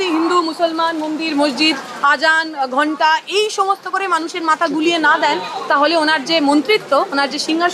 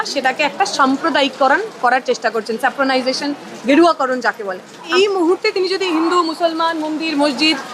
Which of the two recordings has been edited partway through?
second; 1 cut; at 4.9 s

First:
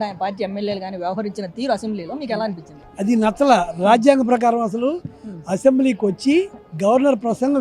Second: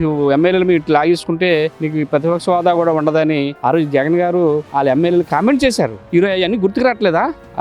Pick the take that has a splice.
second; 4 cuts; at 1.8 s, 3.5 s, 4.7 s, 6.0 s

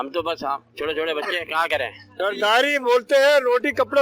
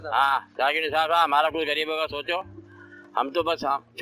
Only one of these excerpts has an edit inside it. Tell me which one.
first; 1 cut; at 2.1 s

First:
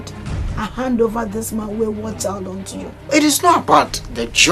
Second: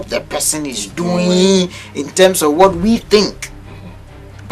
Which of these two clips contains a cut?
first; 1 cut; at 2.9 s

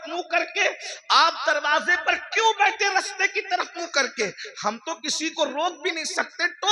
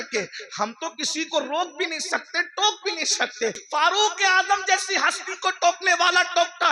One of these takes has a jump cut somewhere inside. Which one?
second; 1 cut; at 3.6 s

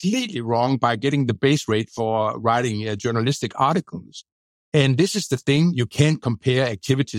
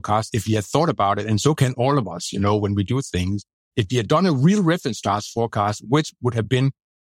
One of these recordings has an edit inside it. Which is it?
second; 1 cut; at 3.5 s

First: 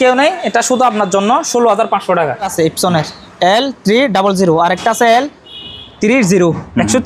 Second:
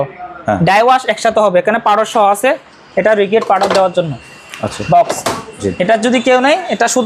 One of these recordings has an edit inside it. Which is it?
first; 1 cut; at 2.5 s

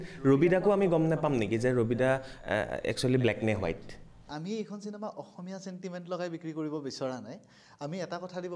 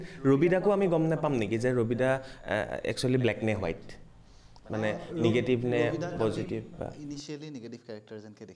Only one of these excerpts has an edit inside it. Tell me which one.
first; 1 cut; at 4.3 s

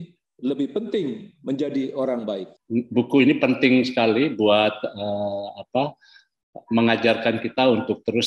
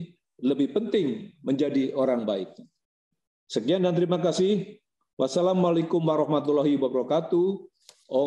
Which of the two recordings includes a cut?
first; 1 cut; at 2.5 s

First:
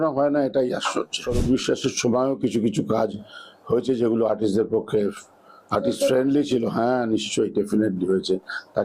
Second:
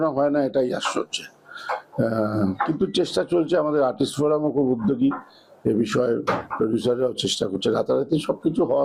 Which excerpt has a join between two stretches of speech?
first; 1 cut; at 1.2 s

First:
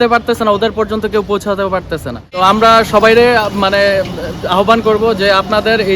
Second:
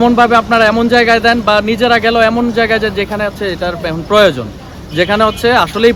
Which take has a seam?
first; 1 cut; at 2.3 s

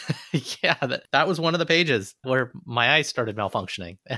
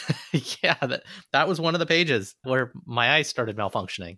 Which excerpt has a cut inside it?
first; 1 cut; at 1.0 s

